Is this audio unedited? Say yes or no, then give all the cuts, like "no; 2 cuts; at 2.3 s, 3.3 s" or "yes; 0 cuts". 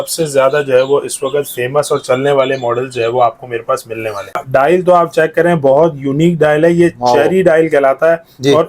no; 1 cut; at 4.4 s